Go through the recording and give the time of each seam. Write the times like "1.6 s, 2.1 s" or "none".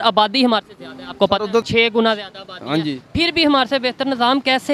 1.7 s